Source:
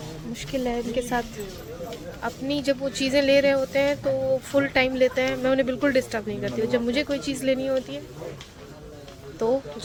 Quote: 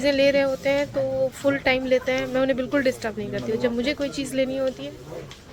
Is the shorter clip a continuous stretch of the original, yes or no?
yes